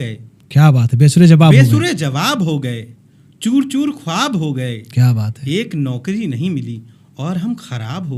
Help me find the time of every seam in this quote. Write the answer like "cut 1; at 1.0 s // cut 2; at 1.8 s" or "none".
none